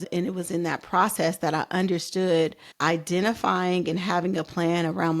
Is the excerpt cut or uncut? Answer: cut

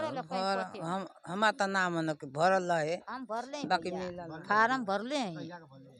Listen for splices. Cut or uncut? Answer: uncut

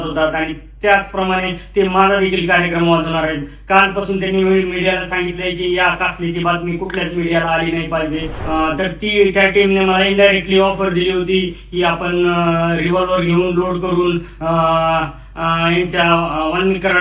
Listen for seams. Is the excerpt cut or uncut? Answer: cut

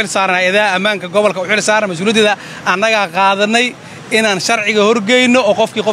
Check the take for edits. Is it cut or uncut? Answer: uncut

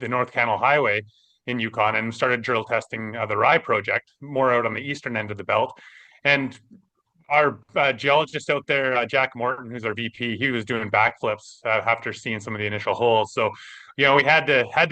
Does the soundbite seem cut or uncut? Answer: uncut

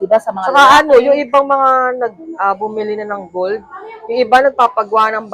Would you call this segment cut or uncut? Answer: uncut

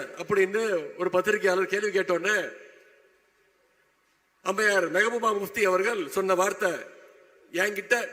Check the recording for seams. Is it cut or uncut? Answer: uncut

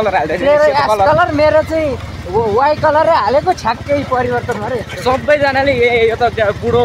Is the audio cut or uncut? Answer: uncut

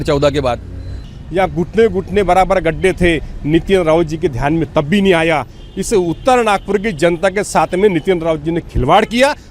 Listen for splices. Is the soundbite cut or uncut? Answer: cut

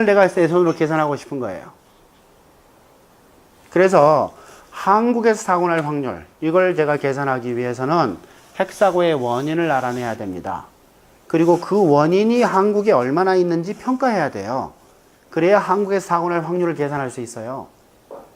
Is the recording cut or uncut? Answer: uncut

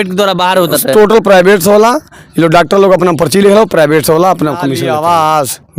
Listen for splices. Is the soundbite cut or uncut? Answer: cut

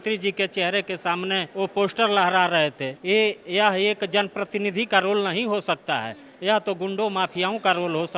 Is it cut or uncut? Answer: cut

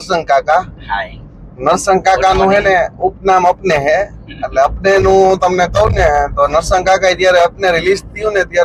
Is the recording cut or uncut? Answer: uncut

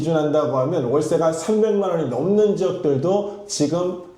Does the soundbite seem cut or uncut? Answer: uncut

